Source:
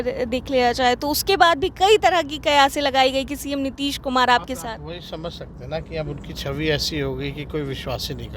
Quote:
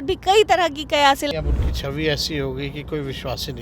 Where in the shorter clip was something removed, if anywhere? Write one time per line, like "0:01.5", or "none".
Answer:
0:01.3